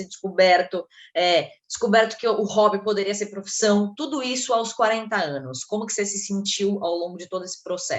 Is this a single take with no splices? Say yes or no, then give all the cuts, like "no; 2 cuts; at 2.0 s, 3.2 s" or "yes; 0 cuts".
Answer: yes; 0 cuts